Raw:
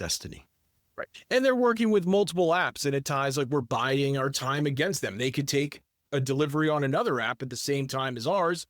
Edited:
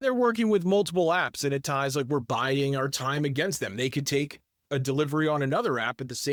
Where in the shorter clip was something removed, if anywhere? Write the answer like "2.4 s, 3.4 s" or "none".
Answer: none